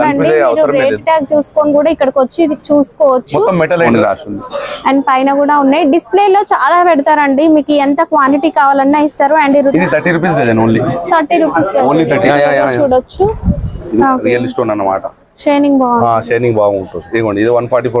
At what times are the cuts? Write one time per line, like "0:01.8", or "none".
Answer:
0:03.9
0:09.7
0:12.3
0:13.8

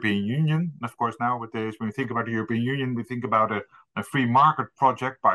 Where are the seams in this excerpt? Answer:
none

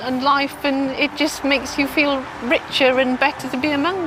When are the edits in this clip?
none

